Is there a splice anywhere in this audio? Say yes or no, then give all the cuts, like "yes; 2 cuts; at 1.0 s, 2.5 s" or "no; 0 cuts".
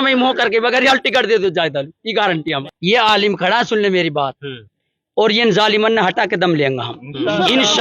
yes; 1 cut; at 2.7 s